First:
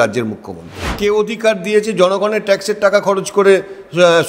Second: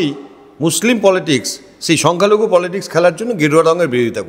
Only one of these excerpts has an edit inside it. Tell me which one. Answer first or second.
first